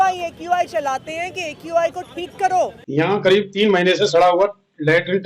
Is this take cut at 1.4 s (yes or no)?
no